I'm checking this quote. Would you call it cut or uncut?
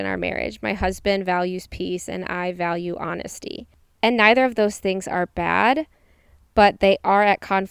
uncut